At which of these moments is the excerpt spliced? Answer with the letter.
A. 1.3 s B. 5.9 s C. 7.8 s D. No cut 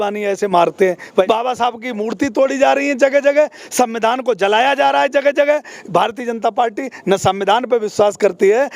A